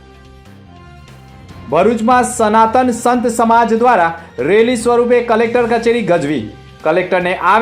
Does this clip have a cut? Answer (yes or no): yes